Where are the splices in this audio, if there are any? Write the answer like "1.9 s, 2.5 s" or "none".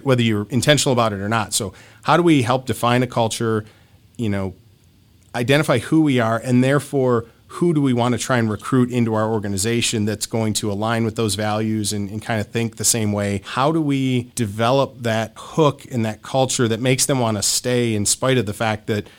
13.5 s, 14.3 s, 15.4 s

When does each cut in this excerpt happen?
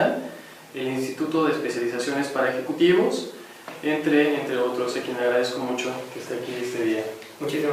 2.8 s

